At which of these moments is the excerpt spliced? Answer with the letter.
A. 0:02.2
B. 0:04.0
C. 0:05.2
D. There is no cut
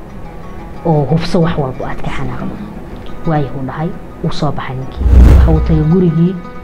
C